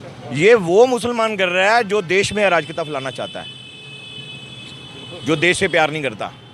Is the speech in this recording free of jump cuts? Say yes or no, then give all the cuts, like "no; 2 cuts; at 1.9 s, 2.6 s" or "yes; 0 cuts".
yes; 0 cuts